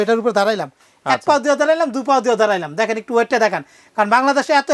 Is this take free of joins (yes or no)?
yes